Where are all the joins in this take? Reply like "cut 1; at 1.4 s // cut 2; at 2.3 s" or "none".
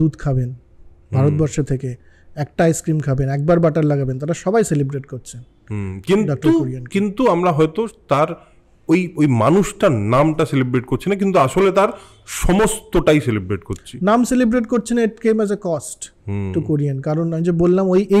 none